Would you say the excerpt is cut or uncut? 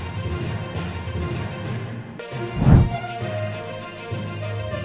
cut